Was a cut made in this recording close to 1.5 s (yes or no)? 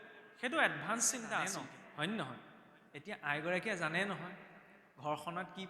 yes